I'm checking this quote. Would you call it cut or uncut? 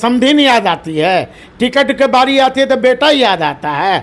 uncut